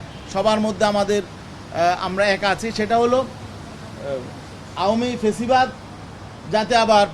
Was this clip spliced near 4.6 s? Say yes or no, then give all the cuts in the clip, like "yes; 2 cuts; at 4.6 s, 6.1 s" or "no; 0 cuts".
no; 0 cuts